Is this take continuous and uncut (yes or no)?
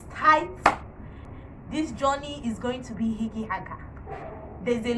no